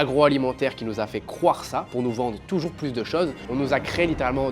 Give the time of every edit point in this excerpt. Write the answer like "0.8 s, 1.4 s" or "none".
3.4 s

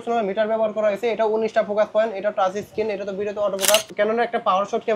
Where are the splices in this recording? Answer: 3.9 s

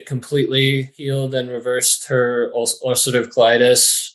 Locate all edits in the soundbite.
1.0 s

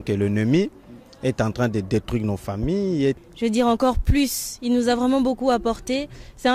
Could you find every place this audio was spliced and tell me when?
3.2 s

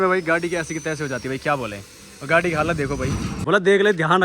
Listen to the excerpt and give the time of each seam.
3.3 s

